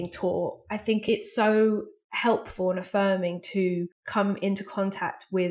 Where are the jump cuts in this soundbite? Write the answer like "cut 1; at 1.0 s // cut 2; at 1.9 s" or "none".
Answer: cut 1; at 1.0 s // cut 2; at 4.0 s